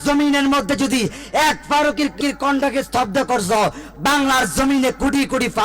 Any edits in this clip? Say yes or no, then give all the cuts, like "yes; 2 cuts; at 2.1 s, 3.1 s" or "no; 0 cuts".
yes; 1 cut; at 2.2 s